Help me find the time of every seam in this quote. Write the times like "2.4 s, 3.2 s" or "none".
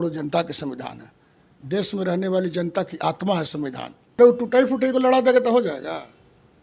4.1 s